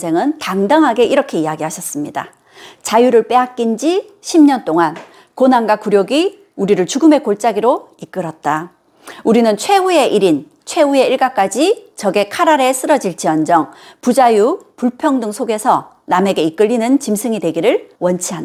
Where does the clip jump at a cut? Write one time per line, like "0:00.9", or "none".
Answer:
none